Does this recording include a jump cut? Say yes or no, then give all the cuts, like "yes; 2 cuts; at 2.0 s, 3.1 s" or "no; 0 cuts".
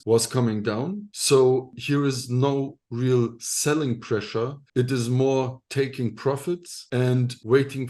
no; 0 cuts